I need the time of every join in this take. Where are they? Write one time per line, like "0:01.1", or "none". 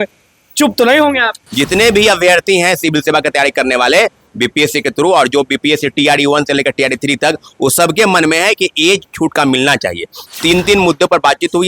0:01.4
0:10.2